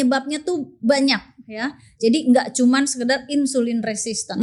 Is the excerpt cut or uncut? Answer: uncut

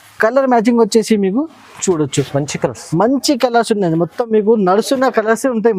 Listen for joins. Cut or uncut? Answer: uncut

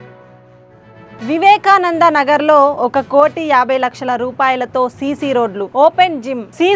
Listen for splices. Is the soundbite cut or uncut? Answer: uncut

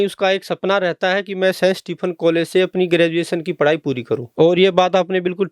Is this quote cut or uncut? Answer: cut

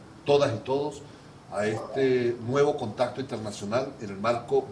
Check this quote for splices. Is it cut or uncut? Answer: uncut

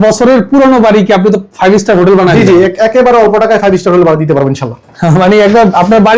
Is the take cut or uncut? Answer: uncut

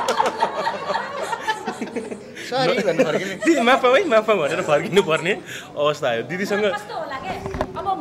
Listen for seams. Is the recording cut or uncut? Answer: uncut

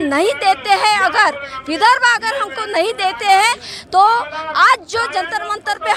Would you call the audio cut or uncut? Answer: uncut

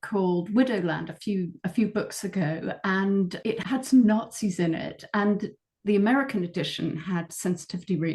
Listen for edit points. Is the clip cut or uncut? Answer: cut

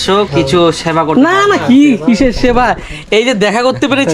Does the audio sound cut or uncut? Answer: uncut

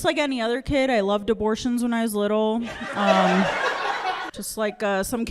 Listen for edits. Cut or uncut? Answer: cut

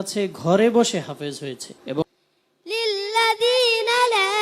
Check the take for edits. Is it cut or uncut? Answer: cut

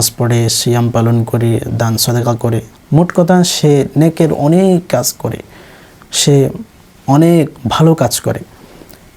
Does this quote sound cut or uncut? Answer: uncut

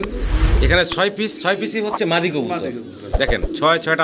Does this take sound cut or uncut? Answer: uncut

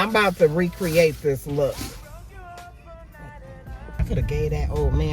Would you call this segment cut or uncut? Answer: cut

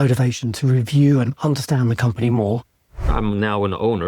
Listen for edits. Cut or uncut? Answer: cut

